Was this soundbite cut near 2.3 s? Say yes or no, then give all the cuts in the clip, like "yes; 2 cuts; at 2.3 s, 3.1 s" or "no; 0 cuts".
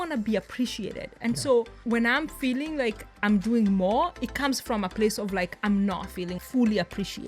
no; 1 cut; at 6.4 s